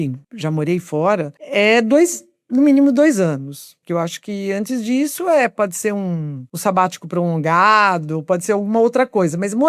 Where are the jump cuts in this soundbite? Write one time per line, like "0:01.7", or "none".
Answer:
0:03.8